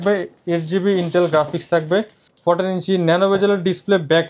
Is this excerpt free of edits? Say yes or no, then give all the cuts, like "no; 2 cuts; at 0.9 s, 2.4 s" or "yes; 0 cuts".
yes; 0 cuts